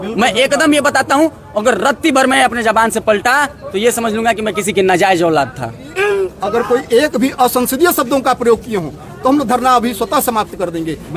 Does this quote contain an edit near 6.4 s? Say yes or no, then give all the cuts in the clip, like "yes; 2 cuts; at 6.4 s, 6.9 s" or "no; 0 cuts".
yes; 1 cut; at 6.4 s